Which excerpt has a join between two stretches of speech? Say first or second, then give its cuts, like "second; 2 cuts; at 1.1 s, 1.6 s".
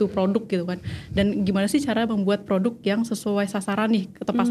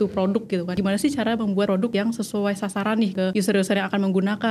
second; 3 cuts; at 0.8 s, 1.8 s, 3.2 s